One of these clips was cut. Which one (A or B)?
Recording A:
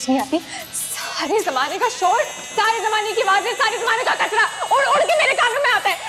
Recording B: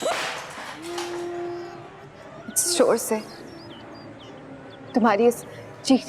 B